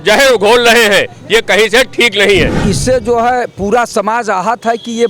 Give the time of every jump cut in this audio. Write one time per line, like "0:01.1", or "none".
0:02.6

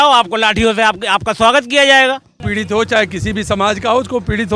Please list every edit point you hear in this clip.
0:02.5

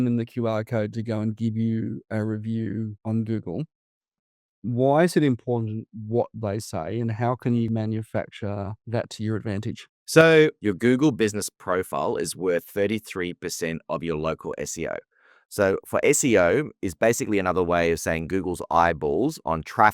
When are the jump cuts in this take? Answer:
0:04.1
0:07.7

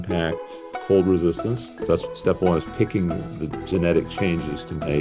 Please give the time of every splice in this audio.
0:02.0

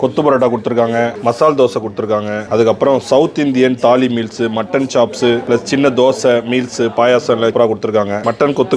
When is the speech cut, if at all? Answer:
0:01.1
0:02.4
0:05.4
0:07.8

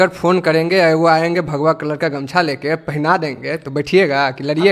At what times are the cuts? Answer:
none

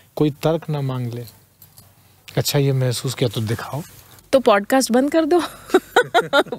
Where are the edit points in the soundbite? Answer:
0:04.1

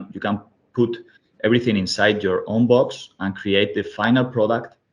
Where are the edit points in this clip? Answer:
none

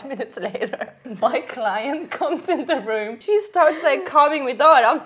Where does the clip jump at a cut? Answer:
0:01.0
0:03.2

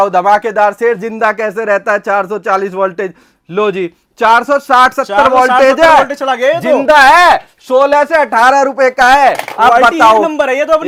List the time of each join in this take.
none

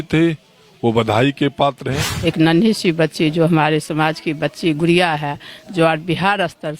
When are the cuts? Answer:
0:02.0

